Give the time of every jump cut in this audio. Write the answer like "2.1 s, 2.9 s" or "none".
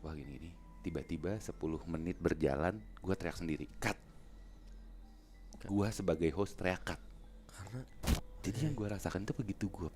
8.0 s